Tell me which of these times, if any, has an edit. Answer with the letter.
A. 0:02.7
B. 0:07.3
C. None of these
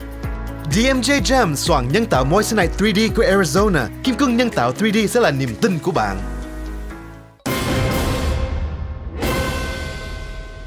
B